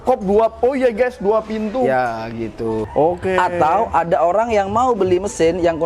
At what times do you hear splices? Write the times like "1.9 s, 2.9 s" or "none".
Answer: 2.9 s